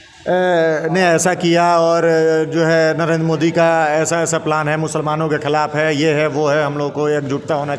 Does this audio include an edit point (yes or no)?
no